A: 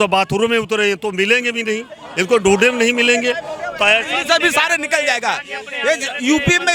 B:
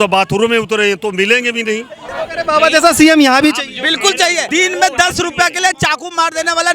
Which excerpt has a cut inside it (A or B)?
B